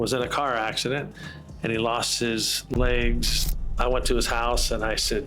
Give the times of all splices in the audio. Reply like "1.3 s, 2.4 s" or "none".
3.4 s